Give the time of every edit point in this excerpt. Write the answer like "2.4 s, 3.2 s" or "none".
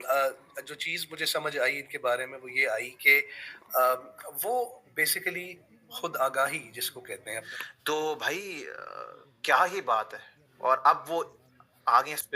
7.5 s